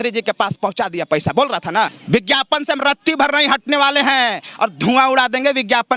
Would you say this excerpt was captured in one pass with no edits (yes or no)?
no